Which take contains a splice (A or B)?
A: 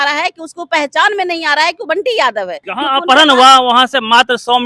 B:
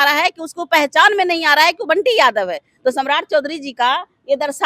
A